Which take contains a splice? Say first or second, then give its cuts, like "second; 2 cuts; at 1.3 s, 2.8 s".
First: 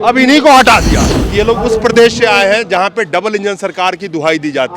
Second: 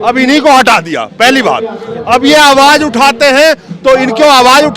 first; 1 cut; at 1.0 s